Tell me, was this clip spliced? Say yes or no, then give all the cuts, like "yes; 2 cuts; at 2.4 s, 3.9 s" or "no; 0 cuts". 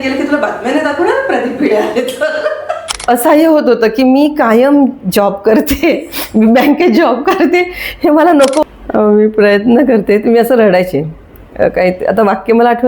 yes; 2 cuts; at 2.9 s, 8.6 s